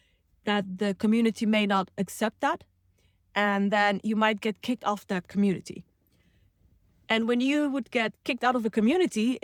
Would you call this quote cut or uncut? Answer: uncut